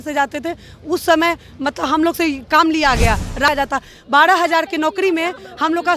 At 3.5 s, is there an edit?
yes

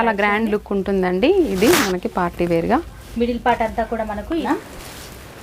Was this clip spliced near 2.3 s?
no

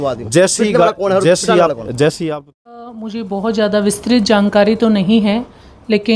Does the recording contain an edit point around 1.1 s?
no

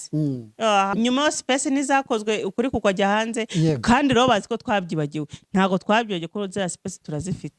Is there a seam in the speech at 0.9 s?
yes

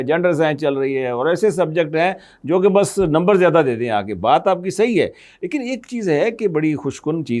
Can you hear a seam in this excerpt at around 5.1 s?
no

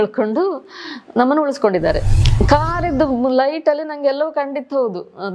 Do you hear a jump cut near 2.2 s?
yes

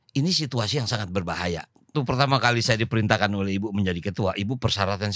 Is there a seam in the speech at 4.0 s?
no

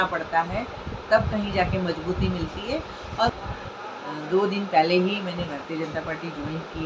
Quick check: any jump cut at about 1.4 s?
no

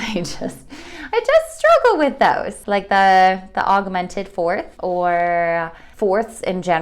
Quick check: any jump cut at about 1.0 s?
no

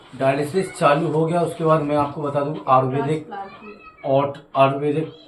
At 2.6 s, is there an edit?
no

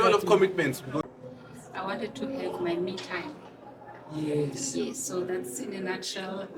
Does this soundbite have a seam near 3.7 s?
no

